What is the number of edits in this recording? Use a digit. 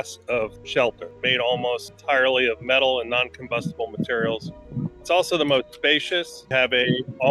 3